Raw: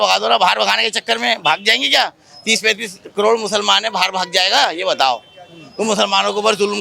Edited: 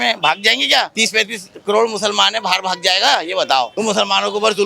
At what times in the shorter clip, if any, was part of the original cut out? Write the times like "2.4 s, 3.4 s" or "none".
0.9 s, 3.7 s